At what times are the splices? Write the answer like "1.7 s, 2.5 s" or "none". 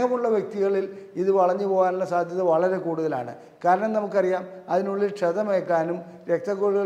none